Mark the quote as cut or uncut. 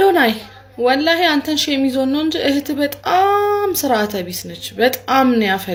uncut